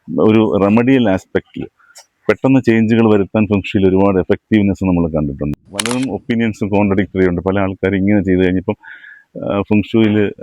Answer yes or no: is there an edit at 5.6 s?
yes